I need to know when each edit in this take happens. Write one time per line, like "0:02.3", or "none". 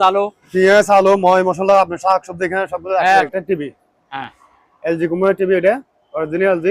0:03.3